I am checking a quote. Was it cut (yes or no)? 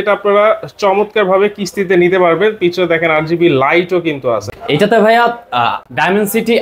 no